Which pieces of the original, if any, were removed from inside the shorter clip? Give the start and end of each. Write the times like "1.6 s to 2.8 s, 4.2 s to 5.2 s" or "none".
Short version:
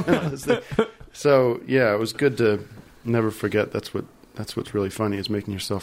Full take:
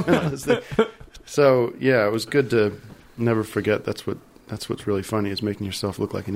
1.0 s to 1.2 s